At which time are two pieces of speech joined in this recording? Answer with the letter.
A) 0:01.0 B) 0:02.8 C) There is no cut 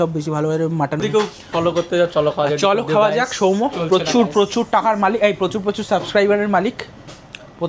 A